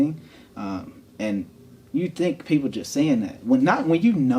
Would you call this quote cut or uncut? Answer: uncut